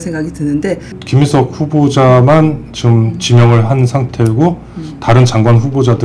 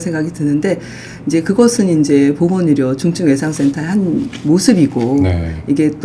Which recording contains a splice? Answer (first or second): first